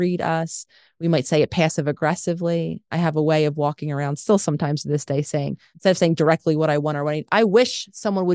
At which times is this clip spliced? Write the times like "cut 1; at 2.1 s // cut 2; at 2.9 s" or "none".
cut 1; at 5.6 s

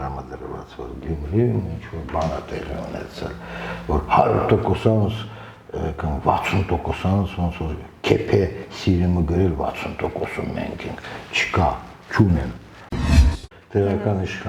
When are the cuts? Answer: cut 1; at 13.0 s

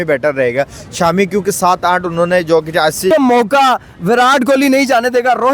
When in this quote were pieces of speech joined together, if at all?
cut 1; at 3.1 s

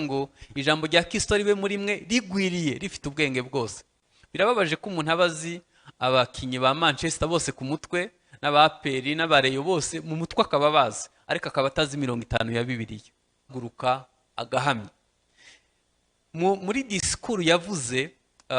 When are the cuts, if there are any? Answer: cut 1; at 13.5 s

